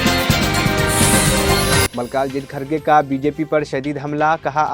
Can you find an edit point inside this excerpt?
yes; 1 cut; at 1.9 s

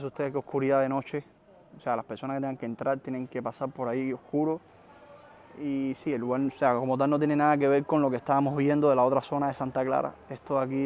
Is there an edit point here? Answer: no; 0 cuts

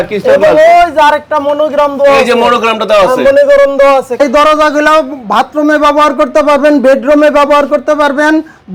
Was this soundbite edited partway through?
yes; 1 cut; at 4.2 s

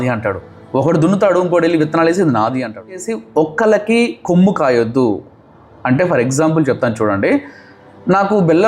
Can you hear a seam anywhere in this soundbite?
yes; 1 cut; at 3.0 s

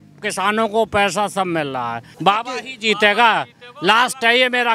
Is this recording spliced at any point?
yes; 1 cut; at 2.0 s

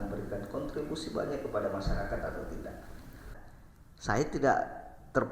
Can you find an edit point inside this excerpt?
yes; 1 cut; at 3.4 s

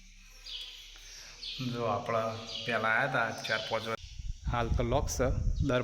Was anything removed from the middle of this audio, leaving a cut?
yes; 1 cut; at 4.0 s

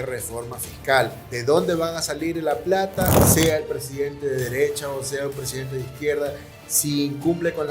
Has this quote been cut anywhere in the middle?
yes; 2 cuts; at 1.3 s, 3.2 s

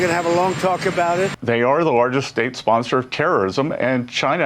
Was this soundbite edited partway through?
yes; 1 cut; at 1.4 s

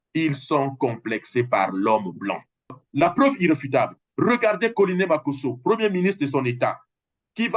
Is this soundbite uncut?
no; 1 cut; at 2.7 s

